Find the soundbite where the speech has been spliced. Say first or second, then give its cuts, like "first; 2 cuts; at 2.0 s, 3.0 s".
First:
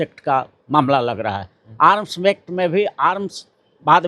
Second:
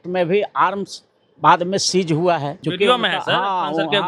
second; 1 cut; at 2.6 s